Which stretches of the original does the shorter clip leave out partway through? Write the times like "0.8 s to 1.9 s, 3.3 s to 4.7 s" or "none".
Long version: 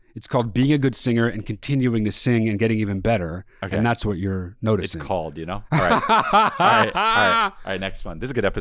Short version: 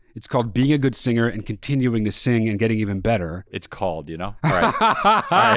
3.6 s to 4.9 s